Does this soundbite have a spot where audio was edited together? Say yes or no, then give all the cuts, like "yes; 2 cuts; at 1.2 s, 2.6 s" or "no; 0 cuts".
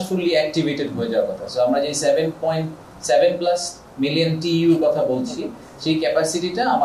no; 0 cuts